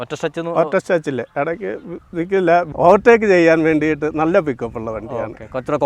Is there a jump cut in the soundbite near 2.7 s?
yes; 1 cut; at 2.7 s

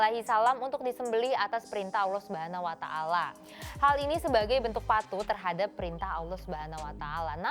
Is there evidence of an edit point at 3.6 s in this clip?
no; 0 cuts

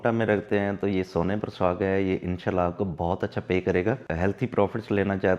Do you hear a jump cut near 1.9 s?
no; 1 cut; at 4.0 s

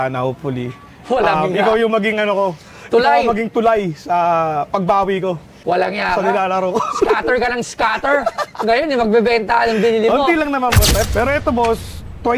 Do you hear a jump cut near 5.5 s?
yes; 2 cuts; at 5.5 s, 11.1 s

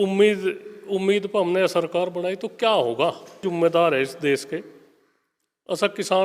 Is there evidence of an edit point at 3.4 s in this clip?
yes; 1 cut; at 3.4 s

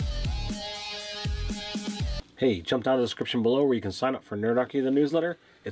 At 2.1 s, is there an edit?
yes; 1 cut; at 2.1 s

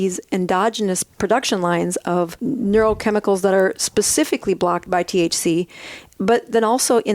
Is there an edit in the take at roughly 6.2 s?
no; 3 cuts; at 1.1 s, 2.4 s, 4.9 s

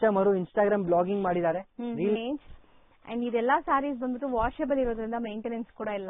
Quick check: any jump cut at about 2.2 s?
yes; 1 cut; at 2.2 s

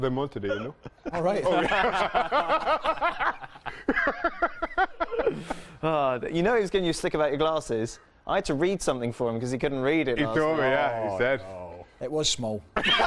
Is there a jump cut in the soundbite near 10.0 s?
yes; 1 cut; at 10.0 s

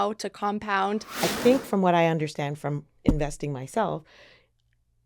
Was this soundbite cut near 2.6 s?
no; 1 cut; at 1.1 s

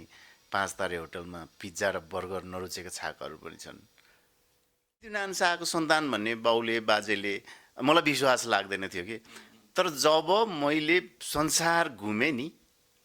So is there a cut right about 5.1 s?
yes; 1 cut; at 5.1 s

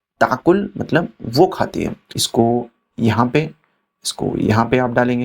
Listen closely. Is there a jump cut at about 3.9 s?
no; 1 cut; at 2.2 s

